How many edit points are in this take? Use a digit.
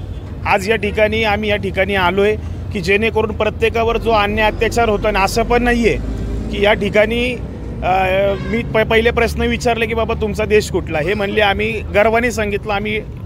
0